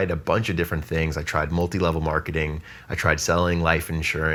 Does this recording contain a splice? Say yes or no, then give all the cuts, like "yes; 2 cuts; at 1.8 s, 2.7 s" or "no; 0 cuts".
no; 0 cuts